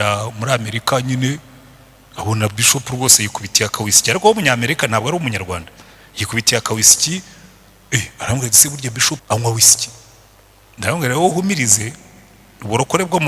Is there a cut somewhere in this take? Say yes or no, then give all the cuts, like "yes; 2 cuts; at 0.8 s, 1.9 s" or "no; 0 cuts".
yes; 1 cut; at 9.2 s